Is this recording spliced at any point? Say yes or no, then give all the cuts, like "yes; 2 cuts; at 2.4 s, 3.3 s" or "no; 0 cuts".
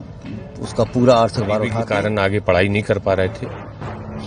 yes; 1 cut; at 1.8 s